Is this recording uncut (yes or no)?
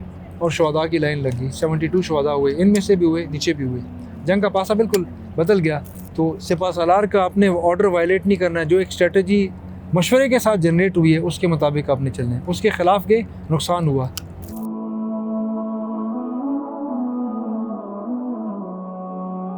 no